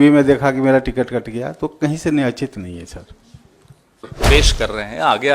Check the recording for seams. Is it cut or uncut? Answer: cut